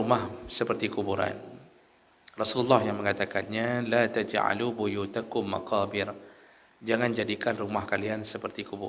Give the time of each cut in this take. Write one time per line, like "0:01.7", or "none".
none